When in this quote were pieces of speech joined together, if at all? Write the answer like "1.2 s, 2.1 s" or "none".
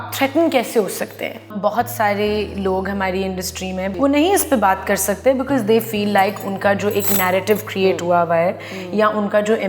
1.5 s, 3.9 s